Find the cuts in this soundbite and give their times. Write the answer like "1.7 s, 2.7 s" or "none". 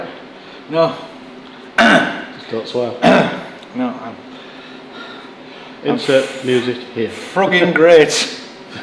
none